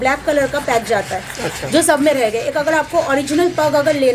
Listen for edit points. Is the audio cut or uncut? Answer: uncut